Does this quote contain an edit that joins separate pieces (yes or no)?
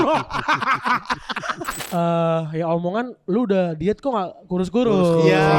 yes